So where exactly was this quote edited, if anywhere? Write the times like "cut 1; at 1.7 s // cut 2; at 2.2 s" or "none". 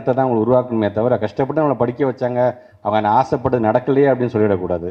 none